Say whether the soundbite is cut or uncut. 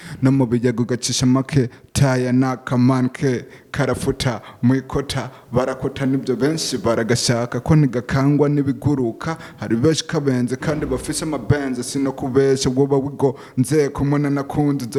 uncut